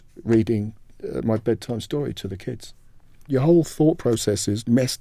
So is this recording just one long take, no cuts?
no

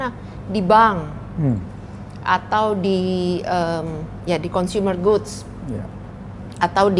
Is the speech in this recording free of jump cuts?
yes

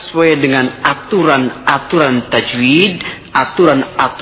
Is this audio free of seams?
yes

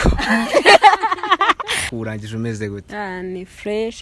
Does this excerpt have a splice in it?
yes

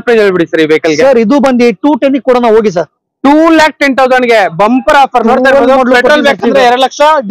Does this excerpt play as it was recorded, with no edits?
yes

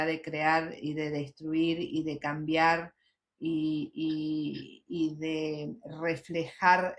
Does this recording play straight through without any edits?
yes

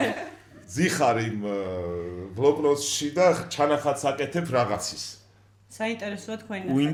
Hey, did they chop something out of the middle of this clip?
no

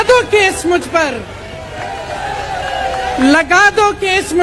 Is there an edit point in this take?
no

